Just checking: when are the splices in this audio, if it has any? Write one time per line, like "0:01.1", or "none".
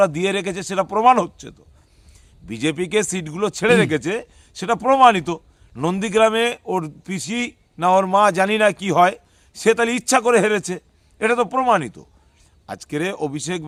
none